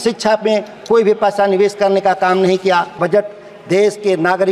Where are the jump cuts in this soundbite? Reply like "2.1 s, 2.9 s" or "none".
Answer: 3.0 s